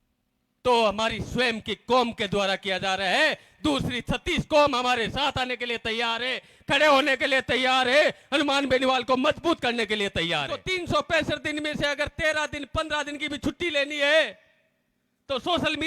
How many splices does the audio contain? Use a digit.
1